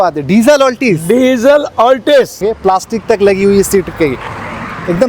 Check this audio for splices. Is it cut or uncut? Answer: cut